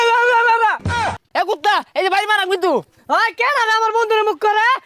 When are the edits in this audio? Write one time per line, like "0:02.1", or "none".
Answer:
0:01.2